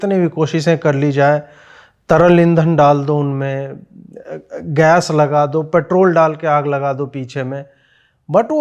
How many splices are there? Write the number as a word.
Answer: zero